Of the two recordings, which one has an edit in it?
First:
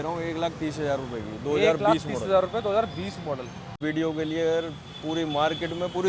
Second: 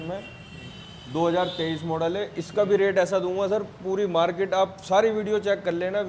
first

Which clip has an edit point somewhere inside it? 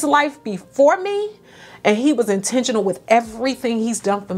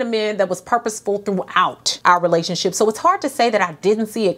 second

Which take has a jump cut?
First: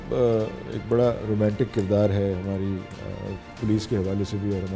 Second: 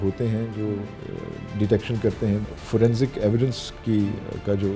second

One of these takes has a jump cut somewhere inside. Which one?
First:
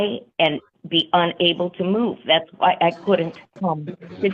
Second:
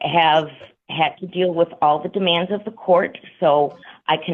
first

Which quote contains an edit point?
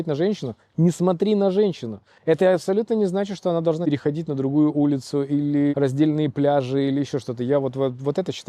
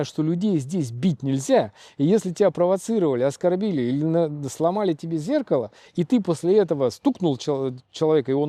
first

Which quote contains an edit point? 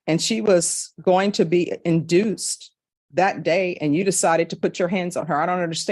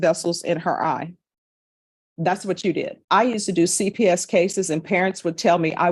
second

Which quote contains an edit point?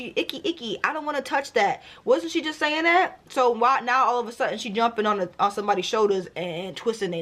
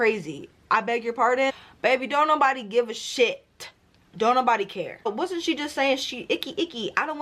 second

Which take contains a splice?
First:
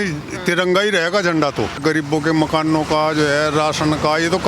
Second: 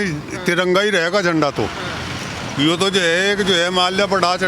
first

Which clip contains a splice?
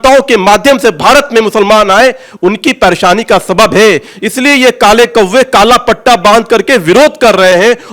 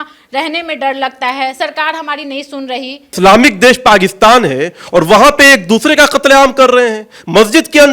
second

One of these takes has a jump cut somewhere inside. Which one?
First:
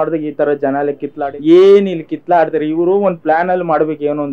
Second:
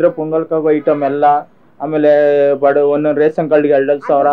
first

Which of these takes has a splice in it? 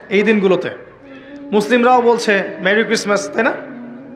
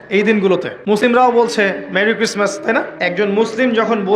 second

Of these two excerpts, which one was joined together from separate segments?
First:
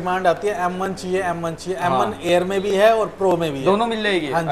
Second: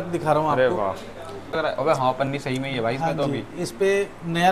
second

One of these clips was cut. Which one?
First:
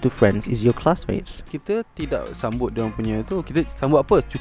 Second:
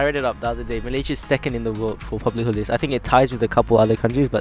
first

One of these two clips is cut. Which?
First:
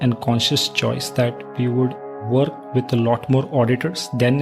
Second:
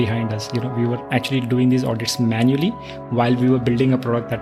first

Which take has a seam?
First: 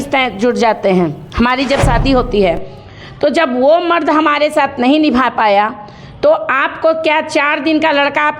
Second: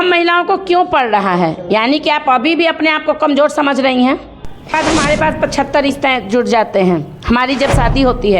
second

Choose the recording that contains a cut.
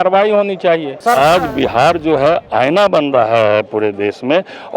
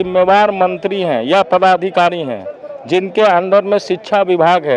first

